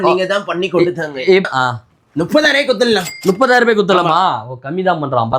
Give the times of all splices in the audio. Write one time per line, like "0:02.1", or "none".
0:01.4